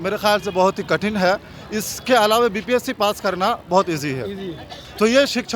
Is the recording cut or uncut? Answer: uncut